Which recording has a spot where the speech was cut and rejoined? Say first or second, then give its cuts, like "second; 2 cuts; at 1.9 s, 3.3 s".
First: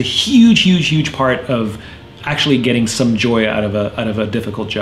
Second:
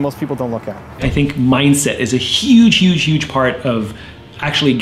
second; 1 cut; at 1.0 s